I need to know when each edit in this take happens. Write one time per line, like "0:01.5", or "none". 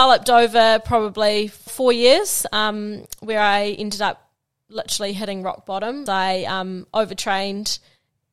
0:01.7
0:06.0